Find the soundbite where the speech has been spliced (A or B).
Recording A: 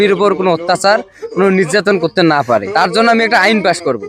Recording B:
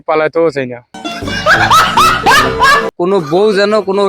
B